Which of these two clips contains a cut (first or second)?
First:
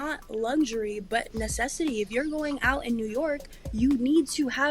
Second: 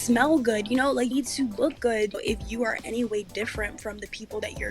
second